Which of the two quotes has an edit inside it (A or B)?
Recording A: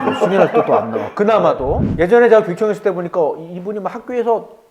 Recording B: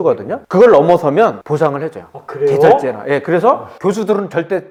A